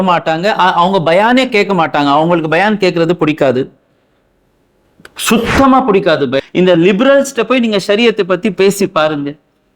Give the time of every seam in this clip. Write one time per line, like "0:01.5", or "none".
0:06.4